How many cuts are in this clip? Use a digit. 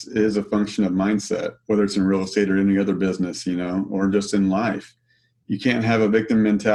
0